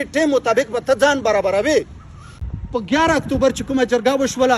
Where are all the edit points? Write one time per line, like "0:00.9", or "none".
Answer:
0:02.4